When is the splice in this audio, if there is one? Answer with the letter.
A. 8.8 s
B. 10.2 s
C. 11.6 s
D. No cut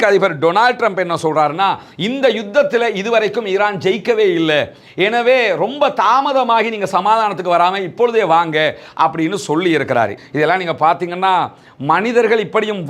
B